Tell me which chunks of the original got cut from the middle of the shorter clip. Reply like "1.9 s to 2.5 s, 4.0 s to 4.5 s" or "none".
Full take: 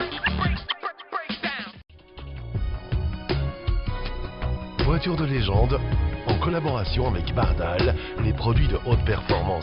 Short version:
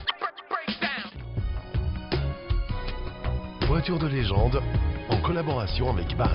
1.8 s to 2.4 s